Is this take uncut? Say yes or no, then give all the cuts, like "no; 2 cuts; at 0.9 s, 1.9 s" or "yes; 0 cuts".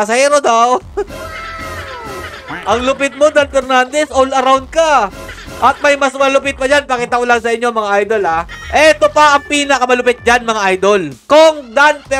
no; 2 cuts; at 8.5 s, 11.2 s